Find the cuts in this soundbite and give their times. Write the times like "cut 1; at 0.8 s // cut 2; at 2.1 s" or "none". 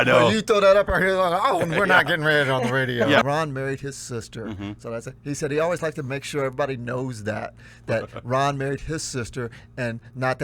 cut 1; at 3.2 s